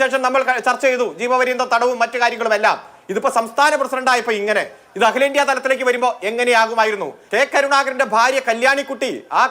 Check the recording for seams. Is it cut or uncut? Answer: cut